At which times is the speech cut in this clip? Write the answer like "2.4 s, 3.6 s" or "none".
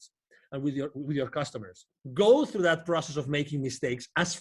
2.0 s